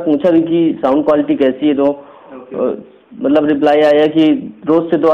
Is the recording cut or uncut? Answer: uncut